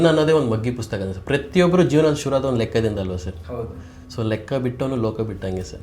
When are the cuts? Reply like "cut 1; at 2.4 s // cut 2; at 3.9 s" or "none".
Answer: none